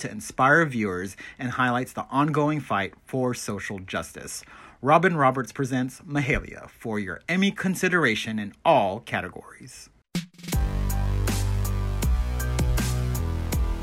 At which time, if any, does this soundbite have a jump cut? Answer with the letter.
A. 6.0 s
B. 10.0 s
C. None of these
B